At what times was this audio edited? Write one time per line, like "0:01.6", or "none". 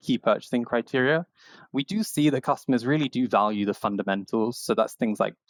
none